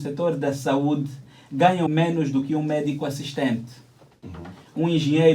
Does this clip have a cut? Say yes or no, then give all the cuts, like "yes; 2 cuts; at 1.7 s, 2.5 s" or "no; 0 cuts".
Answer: yes; 1 cut; at 1.9 s